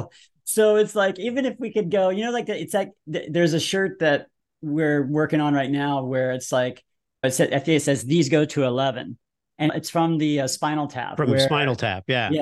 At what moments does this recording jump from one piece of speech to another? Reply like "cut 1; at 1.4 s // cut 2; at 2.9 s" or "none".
cut 1; at 7.2 s // cut 2; at 9.7 s